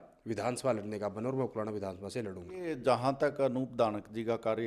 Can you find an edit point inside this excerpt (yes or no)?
yes